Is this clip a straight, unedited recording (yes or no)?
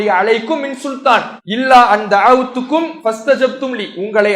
no